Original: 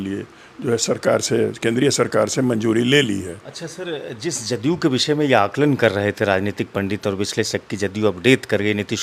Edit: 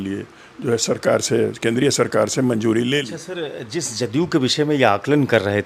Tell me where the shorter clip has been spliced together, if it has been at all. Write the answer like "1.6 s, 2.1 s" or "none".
3.1 s